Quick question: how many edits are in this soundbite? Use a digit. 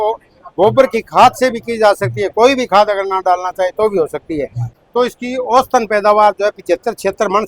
1